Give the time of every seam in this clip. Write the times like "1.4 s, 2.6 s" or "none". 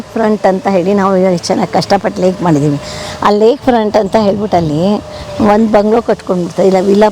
none